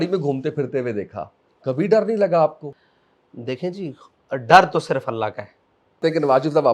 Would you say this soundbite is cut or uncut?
cut